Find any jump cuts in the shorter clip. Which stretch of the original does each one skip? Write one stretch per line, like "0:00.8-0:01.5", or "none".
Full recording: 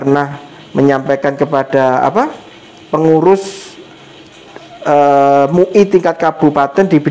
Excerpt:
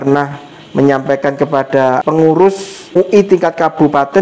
0:02.0-0:02.9
0:03.8-0:05.6